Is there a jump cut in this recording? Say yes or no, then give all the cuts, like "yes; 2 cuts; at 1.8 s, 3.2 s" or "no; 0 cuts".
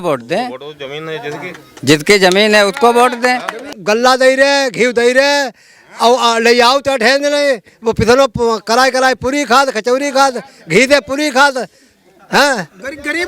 yes; 1 cut; at 3.7 s